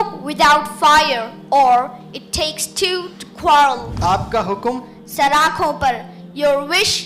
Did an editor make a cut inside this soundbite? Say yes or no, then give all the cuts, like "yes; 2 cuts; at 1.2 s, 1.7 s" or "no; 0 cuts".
yes; 1 cut; at 3.8 s